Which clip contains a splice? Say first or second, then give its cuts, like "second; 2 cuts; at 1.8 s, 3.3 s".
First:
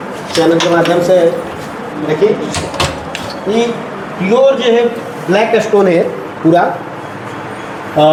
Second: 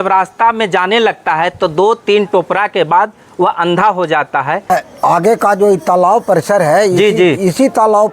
second; 1 cut; at 4.7 s